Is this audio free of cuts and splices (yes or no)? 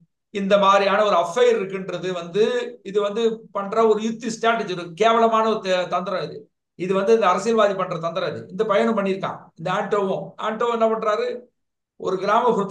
yes